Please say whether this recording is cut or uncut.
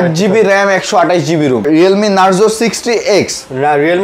cut